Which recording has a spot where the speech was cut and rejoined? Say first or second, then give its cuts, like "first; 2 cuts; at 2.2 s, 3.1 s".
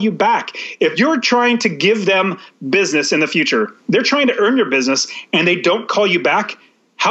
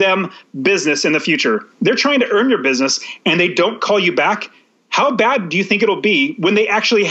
first; 1 cut; at 0.9 s